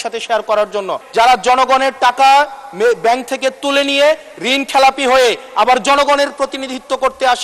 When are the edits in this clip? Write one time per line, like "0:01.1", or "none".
0:01.0